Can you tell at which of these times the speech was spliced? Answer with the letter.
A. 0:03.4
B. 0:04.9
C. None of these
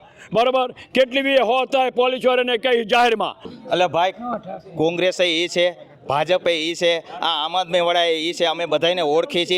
A